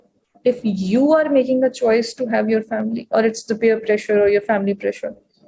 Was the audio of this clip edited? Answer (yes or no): no